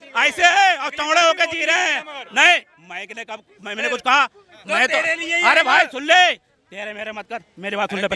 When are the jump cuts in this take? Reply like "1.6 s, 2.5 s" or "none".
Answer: none